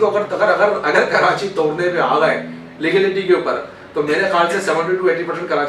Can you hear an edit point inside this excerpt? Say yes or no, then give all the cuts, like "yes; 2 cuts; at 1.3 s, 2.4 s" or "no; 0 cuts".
no; 0 cuts